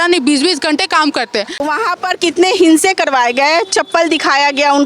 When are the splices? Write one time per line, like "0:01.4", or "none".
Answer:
0:01.6